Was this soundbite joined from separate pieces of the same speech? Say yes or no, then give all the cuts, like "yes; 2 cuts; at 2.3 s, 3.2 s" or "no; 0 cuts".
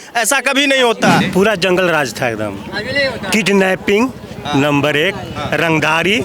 yes; 1 cut; at 1.3 s